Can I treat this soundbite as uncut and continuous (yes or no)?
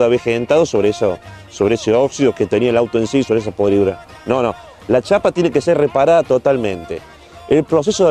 yes